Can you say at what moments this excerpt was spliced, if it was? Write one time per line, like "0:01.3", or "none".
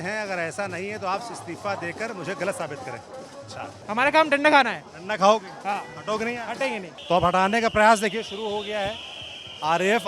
0:03.8
0:06.9